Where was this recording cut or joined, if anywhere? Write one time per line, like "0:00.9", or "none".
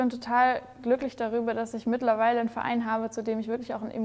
none